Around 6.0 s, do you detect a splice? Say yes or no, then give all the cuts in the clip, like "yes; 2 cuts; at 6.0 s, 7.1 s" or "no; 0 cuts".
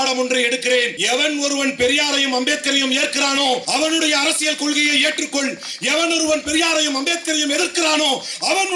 no; 2 cuts; at 1.0 s, 3.6 s